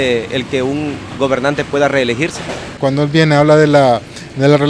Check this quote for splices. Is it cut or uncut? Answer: cut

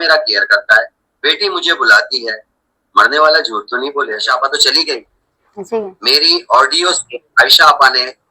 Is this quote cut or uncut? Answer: cut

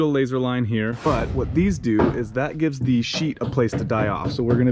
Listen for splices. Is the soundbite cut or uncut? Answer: cut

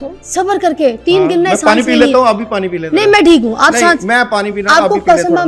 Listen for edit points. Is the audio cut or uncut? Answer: uncut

